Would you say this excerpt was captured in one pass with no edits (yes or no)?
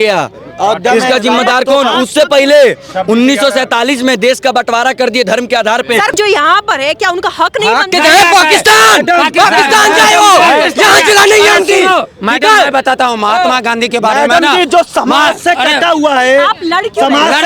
no